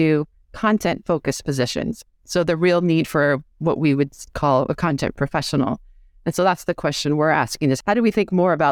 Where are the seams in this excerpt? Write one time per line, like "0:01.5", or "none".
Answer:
0:07.8